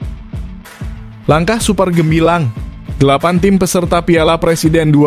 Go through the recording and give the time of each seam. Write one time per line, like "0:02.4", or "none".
0:01.2